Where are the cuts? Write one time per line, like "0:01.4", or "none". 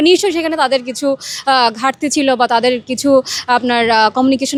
none